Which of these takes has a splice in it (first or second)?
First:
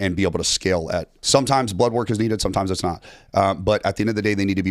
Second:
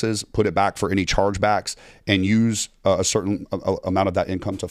first